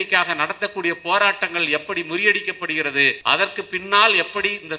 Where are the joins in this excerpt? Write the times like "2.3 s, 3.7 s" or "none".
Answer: 3.2 s